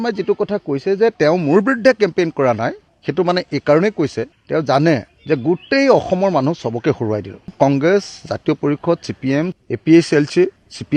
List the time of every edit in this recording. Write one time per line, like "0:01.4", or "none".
none